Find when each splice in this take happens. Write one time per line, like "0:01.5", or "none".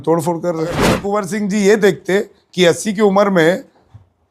0:01.0